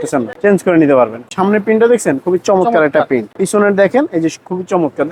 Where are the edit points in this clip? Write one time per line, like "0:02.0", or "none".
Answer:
0:01.2
0:03.3